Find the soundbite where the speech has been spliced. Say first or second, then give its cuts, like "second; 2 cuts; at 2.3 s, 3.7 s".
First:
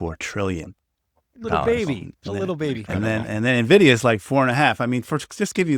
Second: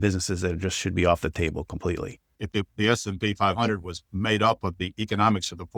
second; 1 cut; at 2.3 s